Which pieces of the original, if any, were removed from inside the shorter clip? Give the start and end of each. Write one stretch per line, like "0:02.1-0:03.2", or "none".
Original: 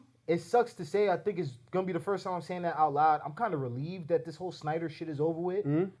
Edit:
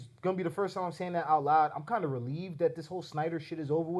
none